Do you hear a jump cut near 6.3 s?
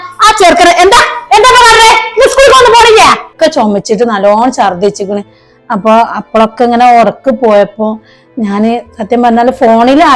no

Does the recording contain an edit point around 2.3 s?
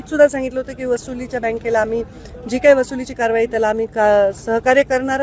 no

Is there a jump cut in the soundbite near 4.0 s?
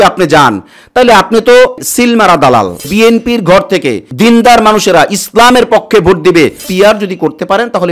yes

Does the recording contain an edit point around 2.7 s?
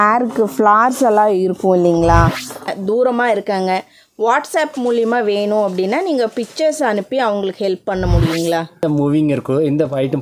yes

